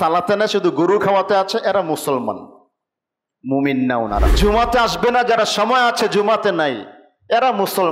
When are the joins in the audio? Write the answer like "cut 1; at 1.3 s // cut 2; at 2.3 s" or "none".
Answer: cut 1; at 4.3 s